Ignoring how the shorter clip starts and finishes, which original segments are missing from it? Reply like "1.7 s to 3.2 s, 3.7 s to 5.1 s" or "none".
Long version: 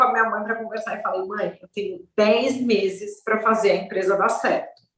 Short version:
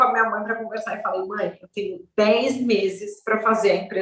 none